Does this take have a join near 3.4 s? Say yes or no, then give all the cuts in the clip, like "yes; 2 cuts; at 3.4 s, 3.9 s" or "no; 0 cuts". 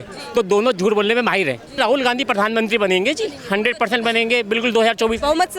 no; 1 cut; at 1.8 s